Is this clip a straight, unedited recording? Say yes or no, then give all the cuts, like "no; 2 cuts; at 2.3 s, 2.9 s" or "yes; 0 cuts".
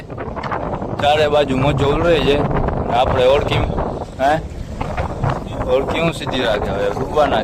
yes; 0 cuts